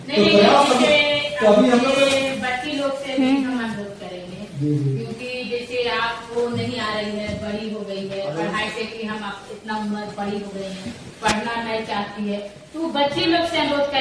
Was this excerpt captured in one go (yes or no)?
yes